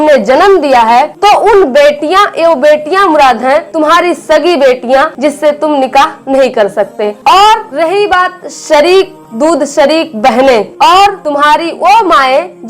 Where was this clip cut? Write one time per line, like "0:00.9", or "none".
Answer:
0:03.7
0:05.1
0:07.1
0:11.2